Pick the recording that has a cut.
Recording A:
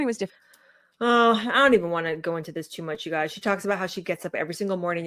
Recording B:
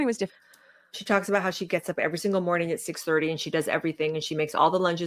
B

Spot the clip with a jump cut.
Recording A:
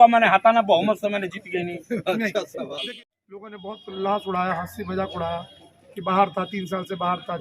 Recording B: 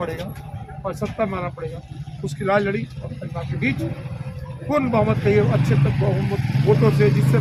A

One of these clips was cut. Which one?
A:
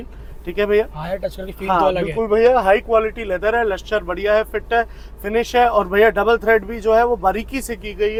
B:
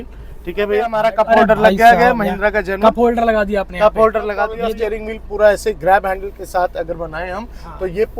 B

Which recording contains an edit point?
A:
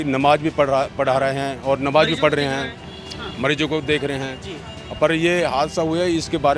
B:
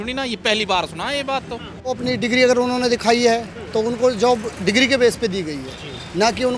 B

